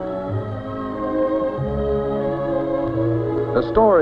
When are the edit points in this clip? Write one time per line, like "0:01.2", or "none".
0:02.1